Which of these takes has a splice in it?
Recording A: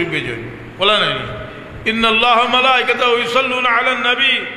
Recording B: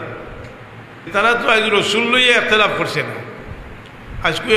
B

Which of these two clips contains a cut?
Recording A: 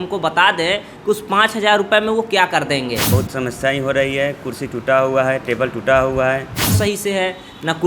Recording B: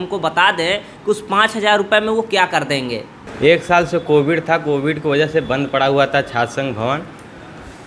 A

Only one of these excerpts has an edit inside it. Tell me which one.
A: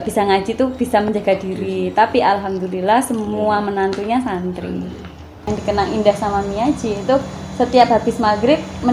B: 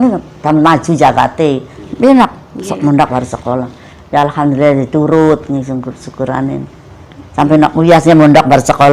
A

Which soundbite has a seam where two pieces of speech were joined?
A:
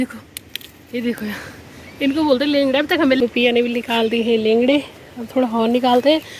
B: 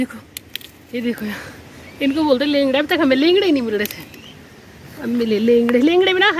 A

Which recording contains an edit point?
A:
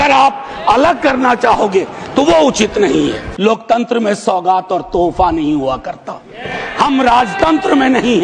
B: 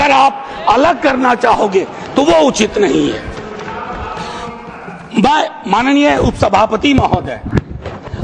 A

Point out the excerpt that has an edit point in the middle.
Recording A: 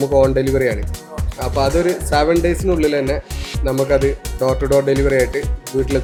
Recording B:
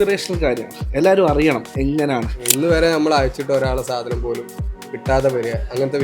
B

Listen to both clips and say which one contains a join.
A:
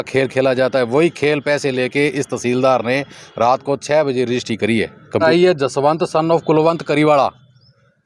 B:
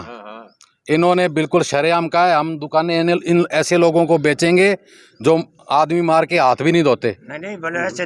A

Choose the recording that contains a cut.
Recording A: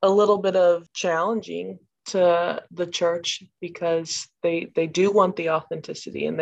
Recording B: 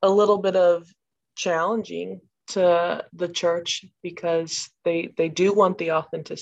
A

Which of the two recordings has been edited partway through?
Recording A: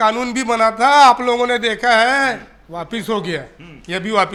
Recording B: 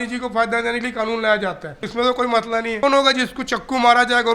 B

